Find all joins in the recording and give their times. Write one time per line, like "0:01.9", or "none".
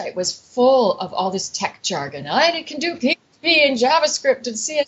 none